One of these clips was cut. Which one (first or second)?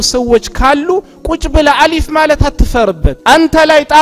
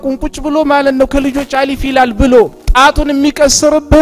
first